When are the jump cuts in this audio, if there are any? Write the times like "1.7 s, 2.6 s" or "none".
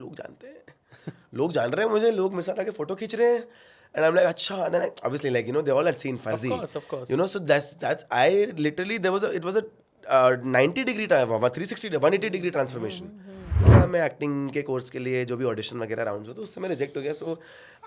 13.6 s